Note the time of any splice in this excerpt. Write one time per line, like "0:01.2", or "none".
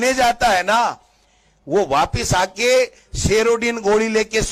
none